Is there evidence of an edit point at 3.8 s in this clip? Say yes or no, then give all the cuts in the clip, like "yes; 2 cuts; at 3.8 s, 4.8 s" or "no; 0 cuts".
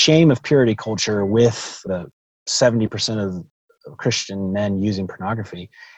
no; 1 cut; at 1.9 s